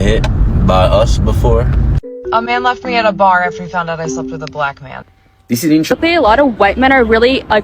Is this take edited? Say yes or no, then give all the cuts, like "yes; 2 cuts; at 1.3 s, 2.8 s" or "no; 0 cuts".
yes; 2 cuts; at 2.0 s, 5.9 s